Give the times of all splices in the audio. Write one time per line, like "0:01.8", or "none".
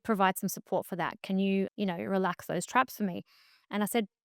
0:01.7